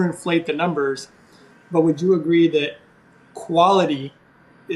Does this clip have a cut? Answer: no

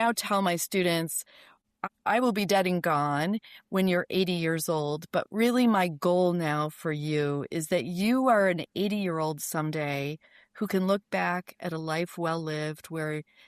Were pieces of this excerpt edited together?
yes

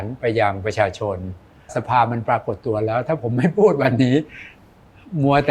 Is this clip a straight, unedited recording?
no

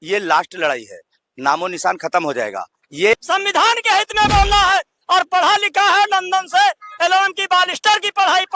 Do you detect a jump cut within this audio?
yes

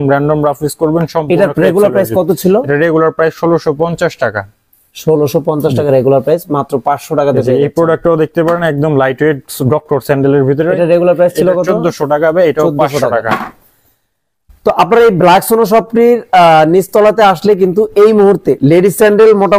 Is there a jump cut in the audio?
no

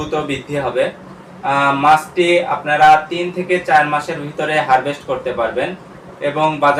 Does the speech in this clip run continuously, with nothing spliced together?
yes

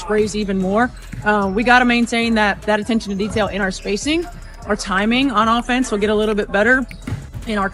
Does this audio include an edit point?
yes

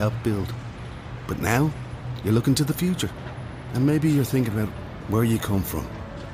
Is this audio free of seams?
yes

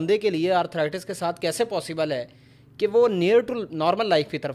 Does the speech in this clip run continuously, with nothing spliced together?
yes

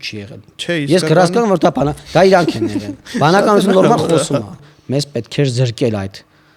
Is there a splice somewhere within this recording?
yes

